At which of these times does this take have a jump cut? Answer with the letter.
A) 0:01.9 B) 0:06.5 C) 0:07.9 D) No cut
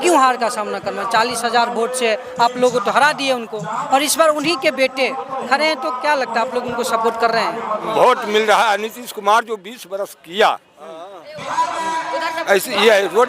C